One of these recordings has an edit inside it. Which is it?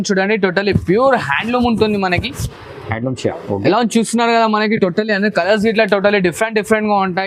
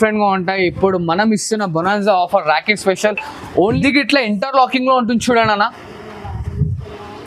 second; 1 cut; at 3.8 s

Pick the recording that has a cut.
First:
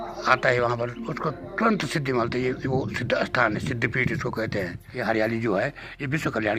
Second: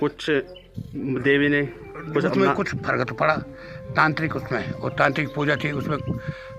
first; 1 cut; at 4.8 s

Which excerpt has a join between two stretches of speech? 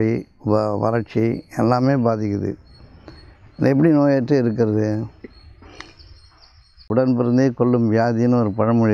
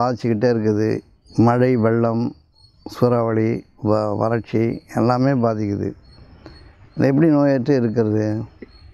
first; 1 cut; at 6.9 s

